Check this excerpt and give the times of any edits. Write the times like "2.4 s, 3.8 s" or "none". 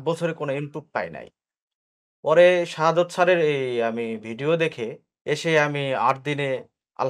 5.1 s